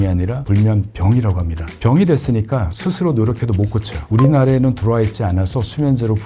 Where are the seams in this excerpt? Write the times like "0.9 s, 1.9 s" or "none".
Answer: 3.9 s